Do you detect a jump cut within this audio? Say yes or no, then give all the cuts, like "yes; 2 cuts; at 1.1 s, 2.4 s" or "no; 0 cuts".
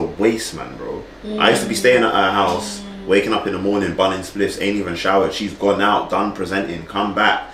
no; 0 cuts